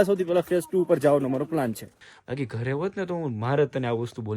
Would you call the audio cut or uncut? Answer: cut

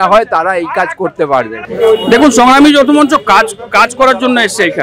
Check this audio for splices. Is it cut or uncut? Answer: uncut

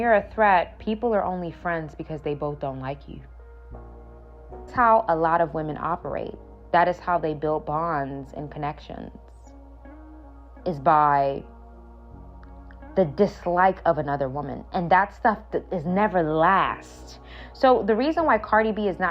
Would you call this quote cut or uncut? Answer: cut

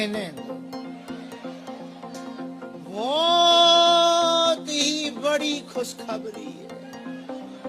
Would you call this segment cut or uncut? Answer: cut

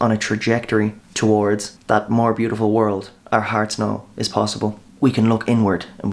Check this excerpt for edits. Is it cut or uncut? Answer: cut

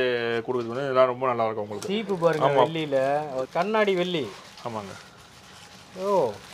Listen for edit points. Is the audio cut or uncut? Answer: cut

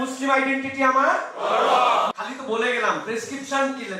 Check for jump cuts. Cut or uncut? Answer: cut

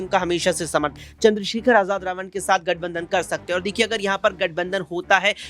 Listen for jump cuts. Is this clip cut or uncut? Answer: cut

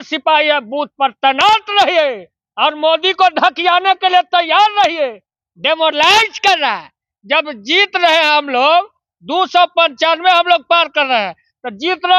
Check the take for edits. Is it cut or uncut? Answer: uncut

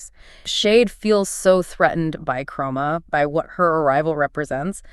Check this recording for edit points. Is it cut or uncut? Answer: uncut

